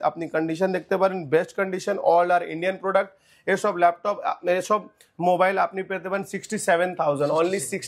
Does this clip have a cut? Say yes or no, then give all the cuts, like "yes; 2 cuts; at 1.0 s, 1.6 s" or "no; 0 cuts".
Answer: no; 0 cuts